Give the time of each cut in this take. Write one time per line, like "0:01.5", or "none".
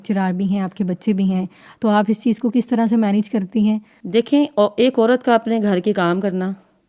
0:03.9